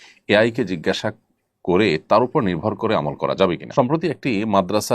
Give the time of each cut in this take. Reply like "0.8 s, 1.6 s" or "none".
3.6 s